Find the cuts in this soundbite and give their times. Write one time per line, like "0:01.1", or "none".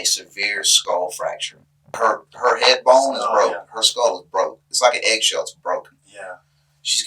0:01.8

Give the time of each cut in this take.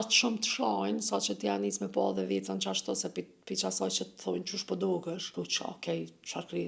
0:05.3

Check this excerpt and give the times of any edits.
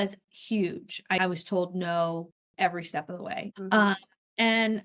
0:01.2
0:03.4

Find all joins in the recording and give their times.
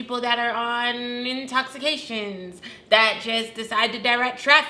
none

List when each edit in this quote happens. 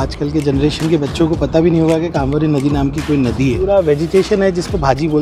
0:03.6

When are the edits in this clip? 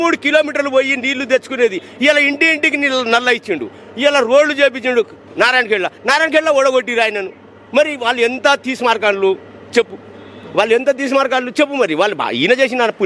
none

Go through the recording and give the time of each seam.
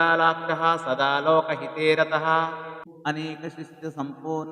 0:02.8

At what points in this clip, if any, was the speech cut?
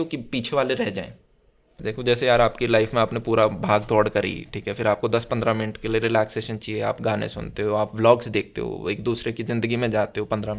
0:01.7

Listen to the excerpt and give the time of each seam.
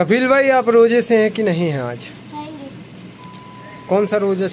none

